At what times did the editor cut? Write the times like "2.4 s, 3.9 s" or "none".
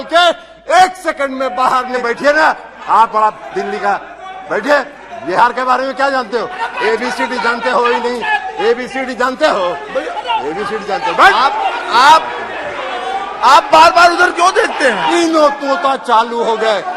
2.0 s, 15.1 s